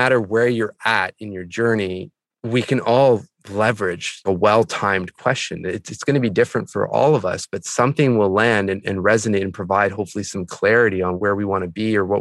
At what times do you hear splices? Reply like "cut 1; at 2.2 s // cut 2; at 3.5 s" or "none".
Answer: cut 1; at 11.2 s